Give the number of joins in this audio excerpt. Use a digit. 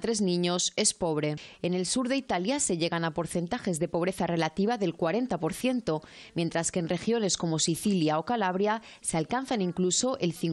0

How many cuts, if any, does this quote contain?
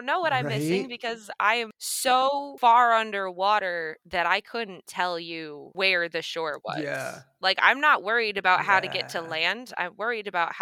0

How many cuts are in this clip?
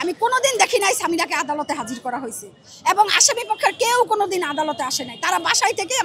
0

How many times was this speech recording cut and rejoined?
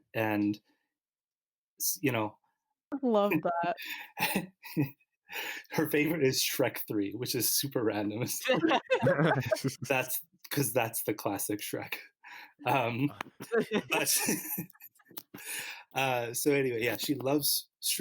1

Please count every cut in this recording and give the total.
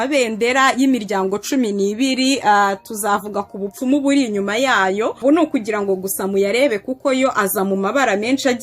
1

